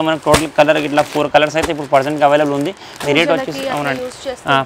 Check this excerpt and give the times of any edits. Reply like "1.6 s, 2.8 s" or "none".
none